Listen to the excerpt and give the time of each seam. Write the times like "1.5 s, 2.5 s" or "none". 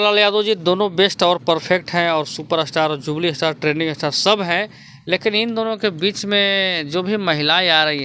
none